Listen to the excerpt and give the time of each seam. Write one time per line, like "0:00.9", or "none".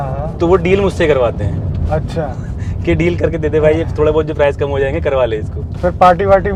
none